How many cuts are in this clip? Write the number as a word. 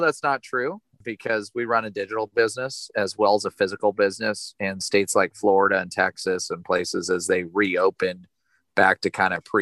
one